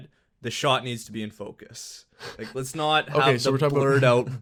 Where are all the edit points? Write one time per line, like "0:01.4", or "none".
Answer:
none